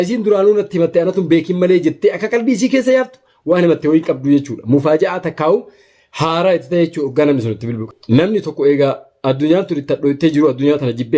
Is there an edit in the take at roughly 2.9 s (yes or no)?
no